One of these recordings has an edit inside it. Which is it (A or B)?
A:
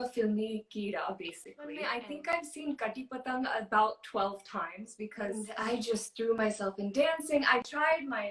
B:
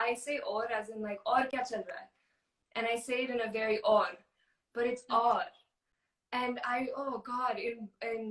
A